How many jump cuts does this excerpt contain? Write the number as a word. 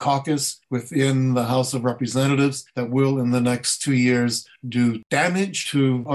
one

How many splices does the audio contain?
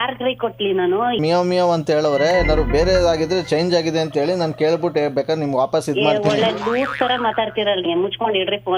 two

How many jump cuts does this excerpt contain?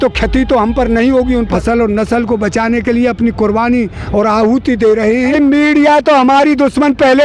two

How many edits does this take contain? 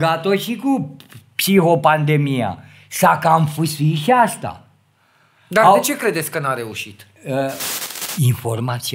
one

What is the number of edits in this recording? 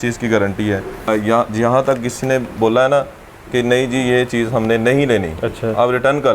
one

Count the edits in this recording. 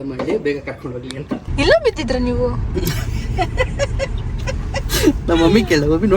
one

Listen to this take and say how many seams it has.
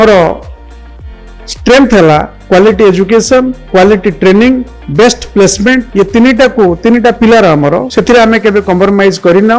five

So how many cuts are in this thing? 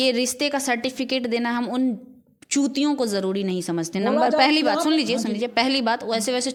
zero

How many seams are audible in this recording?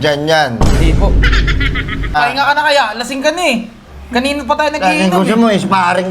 one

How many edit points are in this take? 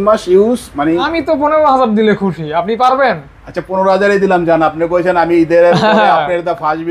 one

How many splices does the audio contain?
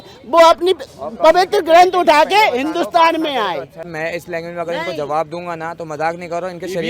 one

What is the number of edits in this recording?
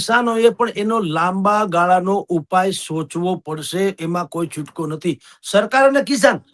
zero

